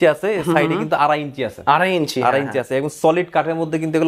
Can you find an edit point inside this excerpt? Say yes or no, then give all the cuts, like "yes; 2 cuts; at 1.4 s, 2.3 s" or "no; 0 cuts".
no; 0 cuts